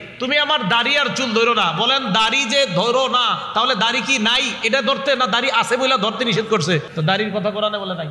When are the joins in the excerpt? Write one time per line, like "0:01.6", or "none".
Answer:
0:06.9